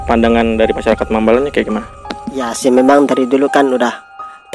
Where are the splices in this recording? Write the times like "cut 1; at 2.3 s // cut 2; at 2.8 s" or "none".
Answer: none